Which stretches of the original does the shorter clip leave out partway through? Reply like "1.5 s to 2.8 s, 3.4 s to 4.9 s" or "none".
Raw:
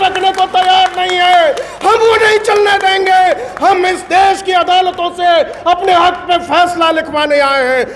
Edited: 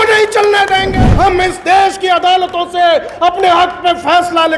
3.1 s to 3.4 s